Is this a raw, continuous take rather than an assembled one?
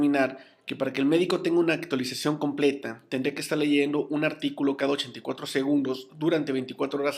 no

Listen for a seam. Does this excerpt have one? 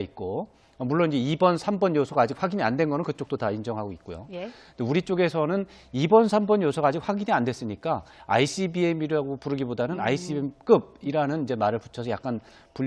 yes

